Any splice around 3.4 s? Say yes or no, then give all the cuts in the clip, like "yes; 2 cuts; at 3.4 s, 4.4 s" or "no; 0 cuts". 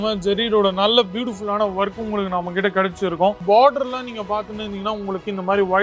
yes; 1 cut; at 3.4 s